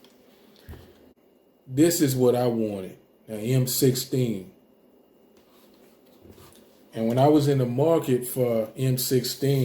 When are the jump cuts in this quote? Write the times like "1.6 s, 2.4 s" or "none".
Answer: 1.1 s